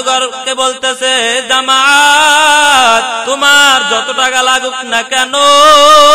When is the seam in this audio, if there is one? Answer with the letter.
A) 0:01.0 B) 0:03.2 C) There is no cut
B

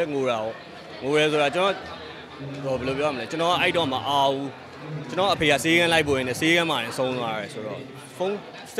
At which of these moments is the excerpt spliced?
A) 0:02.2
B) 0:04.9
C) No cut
C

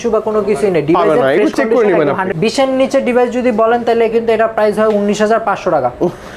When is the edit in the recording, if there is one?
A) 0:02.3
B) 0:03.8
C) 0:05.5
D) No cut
A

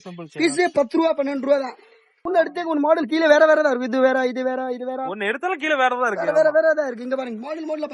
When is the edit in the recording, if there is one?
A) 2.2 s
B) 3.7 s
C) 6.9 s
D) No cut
A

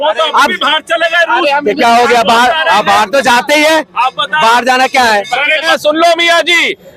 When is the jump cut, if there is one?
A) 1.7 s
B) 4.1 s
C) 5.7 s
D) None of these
C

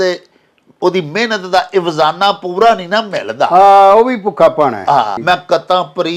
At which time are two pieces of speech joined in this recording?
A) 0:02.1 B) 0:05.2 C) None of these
B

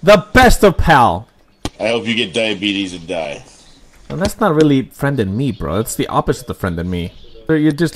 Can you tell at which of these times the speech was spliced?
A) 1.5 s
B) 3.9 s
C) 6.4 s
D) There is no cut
A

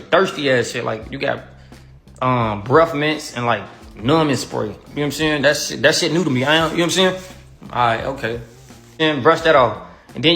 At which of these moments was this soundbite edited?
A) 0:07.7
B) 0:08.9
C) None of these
B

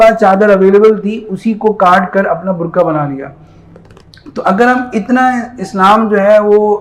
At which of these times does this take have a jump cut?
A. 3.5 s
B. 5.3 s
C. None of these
C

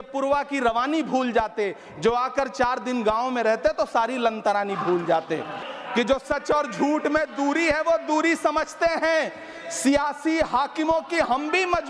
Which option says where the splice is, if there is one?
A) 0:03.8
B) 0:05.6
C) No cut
B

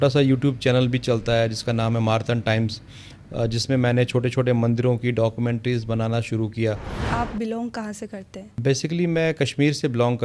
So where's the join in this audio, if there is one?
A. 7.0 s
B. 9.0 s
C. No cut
A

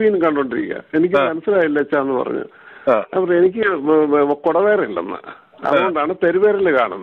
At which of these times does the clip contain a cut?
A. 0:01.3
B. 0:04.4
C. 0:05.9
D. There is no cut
D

